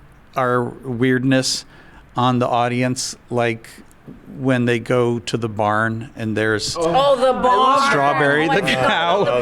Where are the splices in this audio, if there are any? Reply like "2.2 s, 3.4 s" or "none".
none